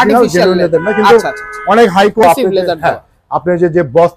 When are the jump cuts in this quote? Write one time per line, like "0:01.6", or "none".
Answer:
0:02.2